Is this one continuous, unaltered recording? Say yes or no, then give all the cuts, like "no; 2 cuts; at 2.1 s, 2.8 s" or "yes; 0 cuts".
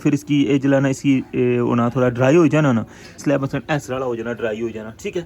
no; 1 cut; at 3.2 s